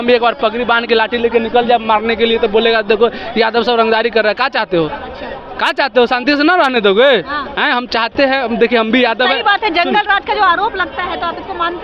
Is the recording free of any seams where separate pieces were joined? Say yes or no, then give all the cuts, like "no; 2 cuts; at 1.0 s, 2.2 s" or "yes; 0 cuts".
yes; 0 cuts